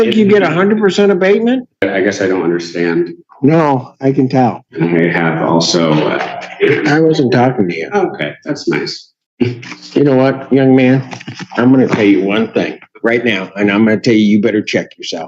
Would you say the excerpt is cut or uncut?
cut